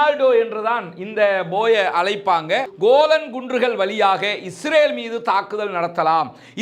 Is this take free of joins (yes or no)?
no